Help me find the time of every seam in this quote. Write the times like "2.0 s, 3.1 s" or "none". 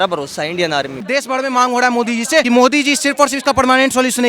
1.1 s, 2.4 s